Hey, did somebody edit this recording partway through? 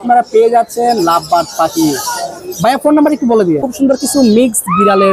yes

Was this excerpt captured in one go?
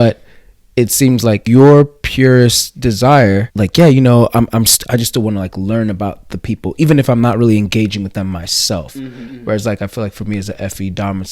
no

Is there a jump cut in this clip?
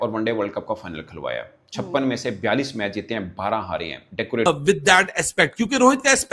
yes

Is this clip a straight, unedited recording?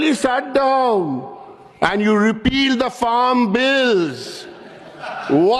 yes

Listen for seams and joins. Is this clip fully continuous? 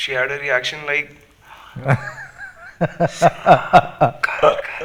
yes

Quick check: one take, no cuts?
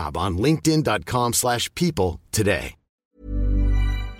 no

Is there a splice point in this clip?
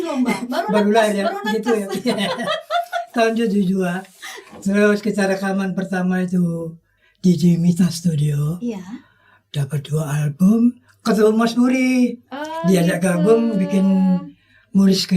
yes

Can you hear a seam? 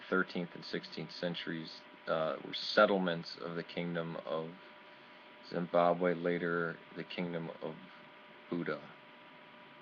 no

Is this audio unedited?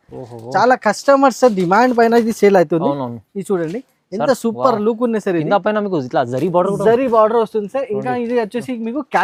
yes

